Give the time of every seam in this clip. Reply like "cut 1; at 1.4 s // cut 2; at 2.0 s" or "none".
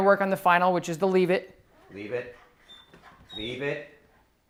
none